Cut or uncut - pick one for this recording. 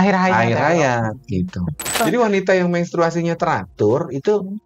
cut